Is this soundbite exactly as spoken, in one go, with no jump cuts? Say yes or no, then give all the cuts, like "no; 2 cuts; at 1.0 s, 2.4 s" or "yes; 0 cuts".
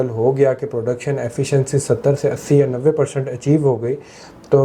yes; 0 cuts